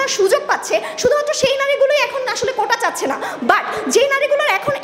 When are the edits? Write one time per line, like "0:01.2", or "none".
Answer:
none